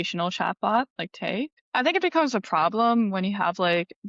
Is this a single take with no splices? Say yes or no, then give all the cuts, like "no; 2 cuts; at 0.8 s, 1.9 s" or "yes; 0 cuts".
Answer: no; 1 cut; at 1.6 s